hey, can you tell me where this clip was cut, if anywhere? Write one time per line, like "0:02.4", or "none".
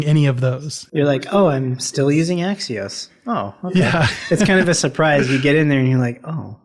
none